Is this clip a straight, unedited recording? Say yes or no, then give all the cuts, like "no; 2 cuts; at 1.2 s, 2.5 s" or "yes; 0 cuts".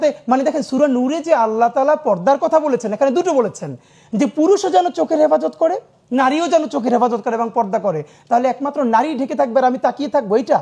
yes; 0 cuts